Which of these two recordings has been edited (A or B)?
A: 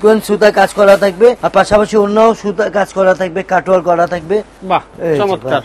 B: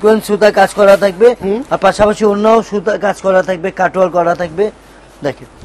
A